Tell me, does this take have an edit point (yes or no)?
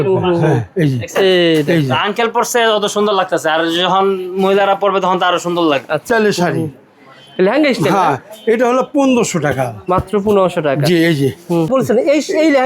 yes